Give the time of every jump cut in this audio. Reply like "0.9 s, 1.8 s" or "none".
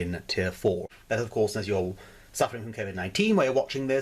0.9 s